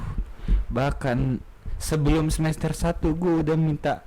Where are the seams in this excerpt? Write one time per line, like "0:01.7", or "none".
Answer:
none